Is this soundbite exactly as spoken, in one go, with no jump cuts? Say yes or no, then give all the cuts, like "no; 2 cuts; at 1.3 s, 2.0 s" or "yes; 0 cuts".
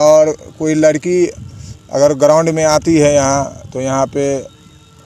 yes; 0 cuts